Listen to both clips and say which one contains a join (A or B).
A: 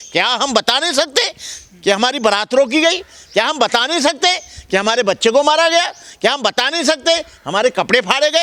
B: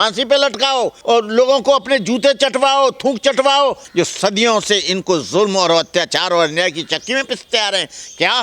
B